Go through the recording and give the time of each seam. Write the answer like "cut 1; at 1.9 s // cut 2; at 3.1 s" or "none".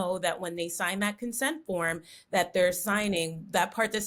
none